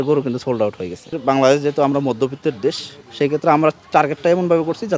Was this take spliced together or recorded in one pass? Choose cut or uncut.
cut